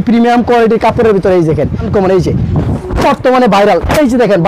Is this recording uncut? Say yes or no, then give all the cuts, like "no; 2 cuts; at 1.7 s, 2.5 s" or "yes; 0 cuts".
no; 1 cut; at 1.9 s